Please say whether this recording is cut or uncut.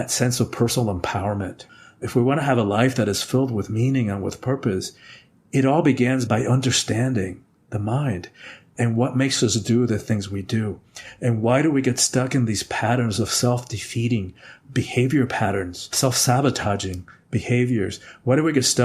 cut